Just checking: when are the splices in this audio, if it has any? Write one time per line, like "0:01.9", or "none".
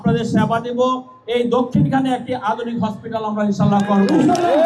none